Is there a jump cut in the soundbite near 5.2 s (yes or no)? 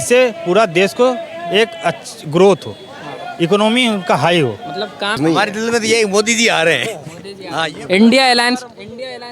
yes